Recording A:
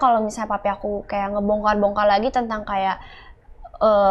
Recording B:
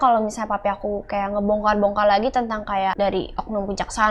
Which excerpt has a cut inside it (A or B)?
B